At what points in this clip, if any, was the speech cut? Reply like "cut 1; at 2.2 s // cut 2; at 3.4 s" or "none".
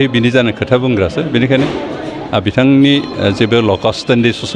none